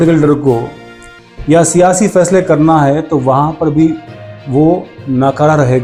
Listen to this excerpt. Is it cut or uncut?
uncut